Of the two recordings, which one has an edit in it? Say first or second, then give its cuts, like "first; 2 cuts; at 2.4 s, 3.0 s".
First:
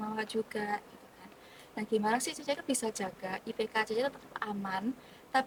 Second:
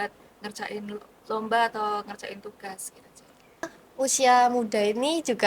second; 1 cut; at 3.8 s